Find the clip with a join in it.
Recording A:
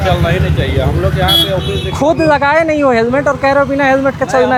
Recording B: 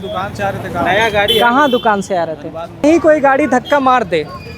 B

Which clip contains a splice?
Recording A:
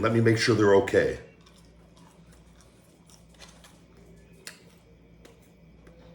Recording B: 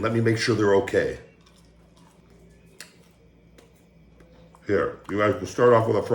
B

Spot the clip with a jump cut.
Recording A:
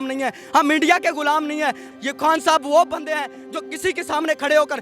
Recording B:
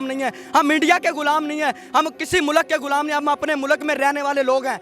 A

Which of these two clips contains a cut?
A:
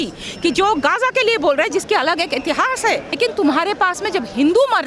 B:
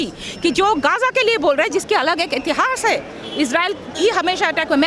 A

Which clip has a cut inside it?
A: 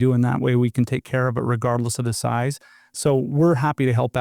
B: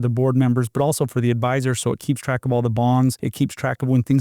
B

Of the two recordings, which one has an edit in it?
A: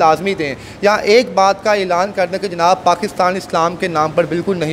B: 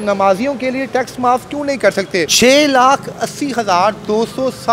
B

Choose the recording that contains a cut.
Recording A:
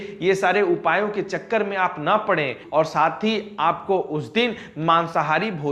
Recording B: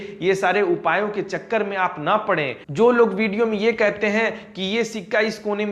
B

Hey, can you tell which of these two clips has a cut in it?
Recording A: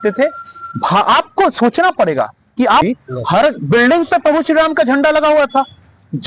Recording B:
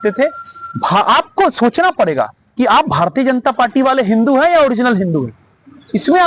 A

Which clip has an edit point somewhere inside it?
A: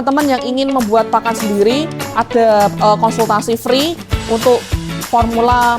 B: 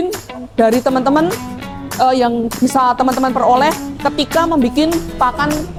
A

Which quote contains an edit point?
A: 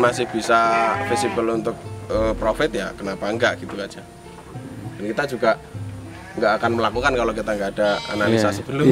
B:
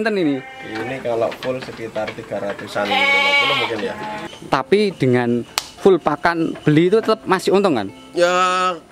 B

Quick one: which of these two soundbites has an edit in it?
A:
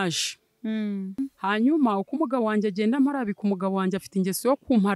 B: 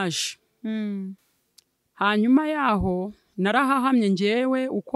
A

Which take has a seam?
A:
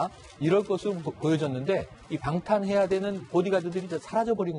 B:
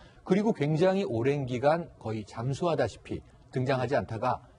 A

